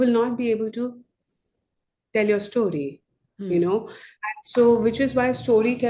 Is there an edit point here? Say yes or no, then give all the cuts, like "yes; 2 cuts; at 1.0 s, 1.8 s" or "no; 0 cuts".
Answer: no; 0 cuts